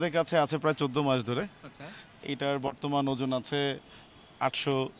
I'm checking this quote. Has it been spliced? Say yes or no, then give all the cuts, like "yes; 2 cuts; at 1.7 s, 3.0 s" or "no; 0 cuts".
no; 0 cuts